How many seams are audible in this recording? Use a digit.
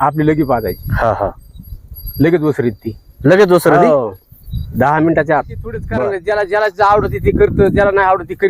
1